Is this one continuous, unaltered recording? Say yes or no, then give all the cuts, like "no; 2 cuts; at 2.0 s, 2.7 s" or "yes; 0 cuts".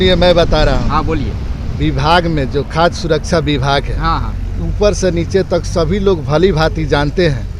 yes; 0 cuts